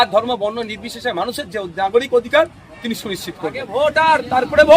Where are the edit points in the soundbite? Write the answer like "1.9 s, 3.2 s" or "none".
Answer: 3.6 s